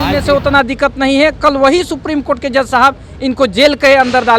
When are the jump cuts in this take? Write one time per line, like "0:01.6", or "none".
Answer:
none

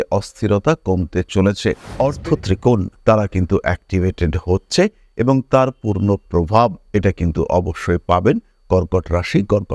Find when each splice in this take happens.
0:01.9

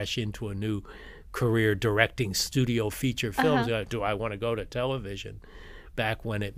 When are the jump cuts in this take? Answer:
none

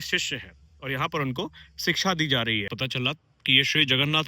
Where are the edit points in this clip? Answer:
0:02.7

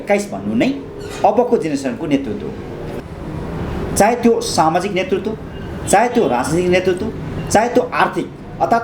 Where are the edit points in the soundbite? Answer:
0:02.8

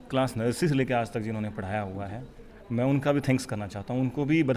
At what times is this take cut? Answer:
none

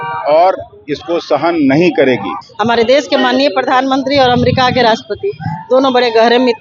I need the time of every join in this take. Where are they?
0:02.4

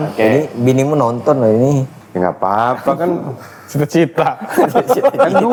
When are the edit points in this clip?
none

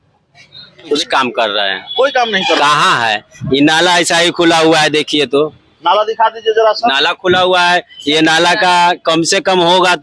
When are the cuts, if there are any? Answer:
0:01.0

